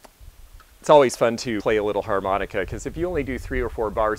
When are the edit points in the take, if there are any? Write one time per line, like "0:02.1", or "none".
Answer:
0:01.6